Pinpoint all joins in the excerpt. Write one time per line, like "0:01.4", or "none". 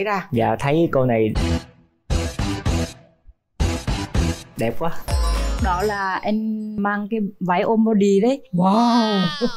0:05.1
0:06.8